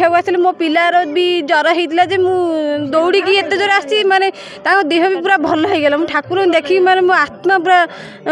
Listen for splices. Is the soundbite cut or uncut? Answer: uncut